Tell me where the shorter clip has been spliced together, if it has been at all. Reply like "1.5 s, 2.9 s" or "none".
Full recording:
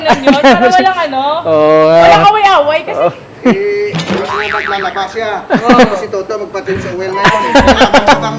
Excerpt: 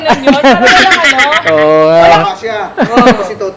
2.2 s